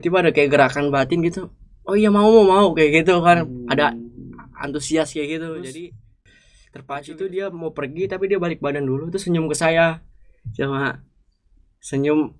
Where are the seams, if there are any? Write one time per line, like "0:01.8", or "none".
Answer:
0:07.1

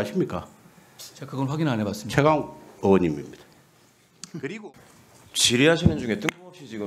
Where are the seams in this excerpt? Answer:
0:04.7

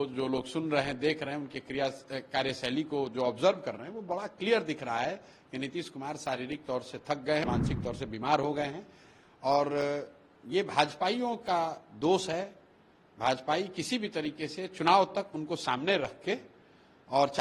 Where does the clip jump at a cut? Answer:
0:07.4

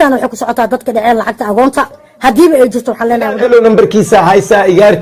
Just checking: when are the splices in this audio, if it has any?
0:03.4

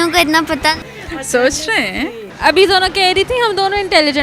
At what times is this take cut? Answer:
0:00.8
0:02.2

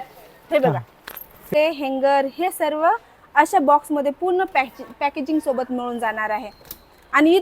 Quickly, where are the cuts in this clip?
0:01.5

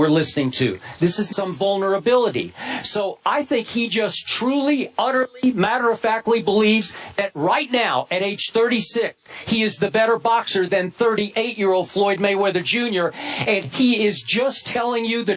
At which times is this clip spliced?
none

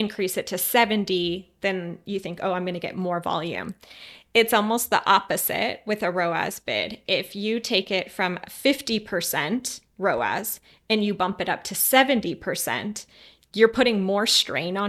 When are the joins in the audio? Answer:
none

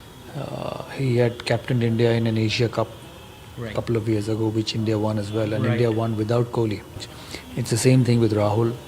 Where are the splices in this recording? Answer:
0:07.1

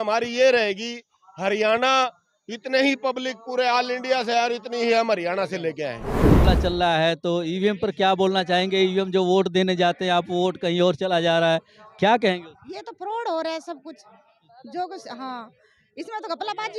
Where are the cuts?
0:06.4

